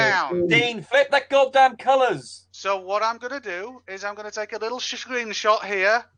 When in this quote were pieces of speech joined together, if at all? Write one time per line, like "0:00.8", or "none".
none

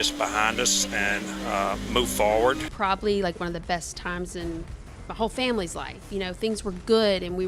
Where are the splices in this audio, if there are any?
0:02.7

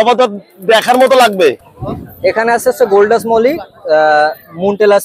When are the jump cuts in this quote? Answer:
0:01.7

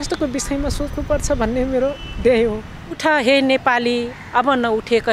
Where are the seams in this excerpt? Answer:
0:03.0

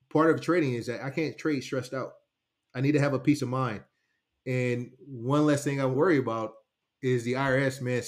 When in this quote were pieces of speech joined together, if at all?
0:05.9

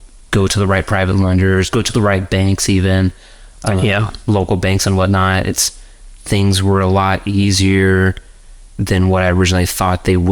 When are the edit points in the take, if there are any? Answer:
none

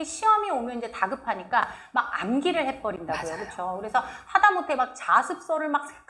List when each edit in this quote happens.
none

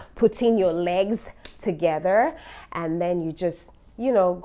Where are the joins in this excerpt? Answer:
none

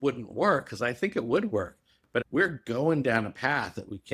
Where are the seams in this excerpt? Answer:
0:02.3

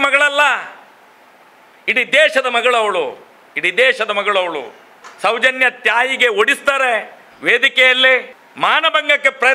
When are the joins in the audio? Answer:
0:05.0
0:08.4

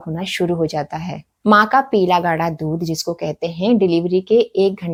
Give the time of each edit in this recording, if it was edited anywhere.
none

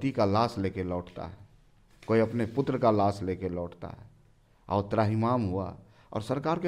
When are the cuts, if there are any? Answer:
none

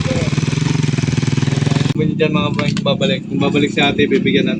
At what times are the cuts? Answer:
0:01.9

